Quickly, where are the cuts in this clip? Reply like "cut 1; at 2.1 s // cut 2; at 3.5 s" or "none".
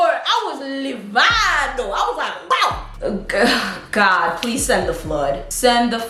none